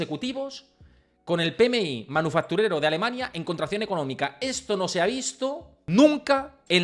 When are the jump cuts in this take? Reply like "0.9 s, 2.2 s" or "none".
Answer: 5.7 s